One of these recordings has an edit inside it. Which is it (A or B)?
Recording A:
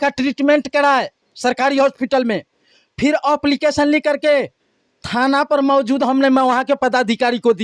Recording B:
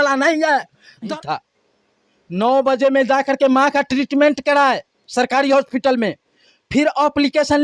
B